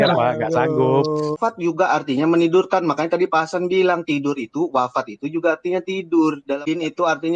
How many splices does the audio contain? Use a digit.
2